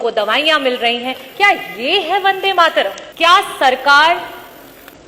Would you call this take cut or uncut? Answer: cut